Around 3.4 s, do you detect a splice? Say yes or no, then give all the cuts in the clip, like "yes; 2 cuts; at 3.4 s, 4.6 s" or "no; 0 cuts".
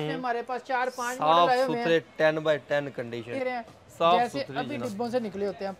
yes; 1 cut; at 3.4 s